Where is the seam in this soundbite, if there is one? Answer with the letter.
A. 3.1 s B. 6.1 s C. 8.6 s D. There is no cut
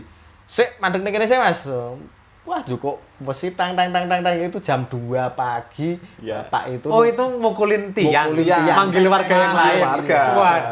D